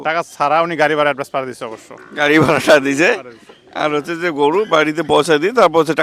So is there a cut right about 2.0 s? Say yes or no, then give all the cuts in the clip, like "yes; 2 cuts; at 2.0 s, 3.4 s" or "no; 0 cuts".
no; 0 cuts